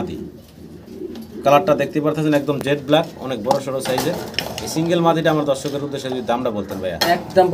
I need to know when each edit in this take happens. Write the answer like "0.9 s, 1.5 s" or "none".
none